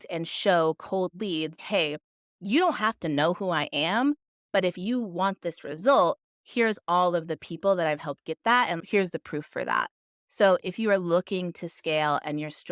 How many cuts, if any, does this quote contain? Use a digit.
1